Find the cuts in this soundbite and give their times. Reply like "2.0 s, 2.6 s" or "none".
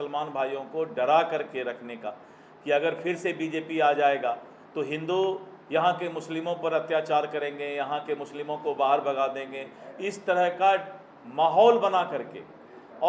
none